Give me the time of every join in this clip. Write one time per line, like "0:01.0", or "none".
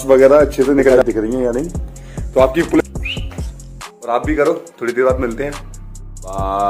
0:01.0
0:02.8